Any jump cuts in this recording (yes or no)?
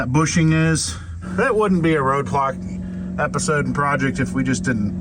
yes